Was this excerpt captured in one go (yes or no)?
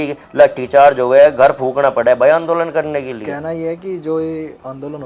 yes